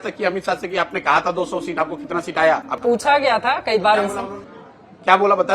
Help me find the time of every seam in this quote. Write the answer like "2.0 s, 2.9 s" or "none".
none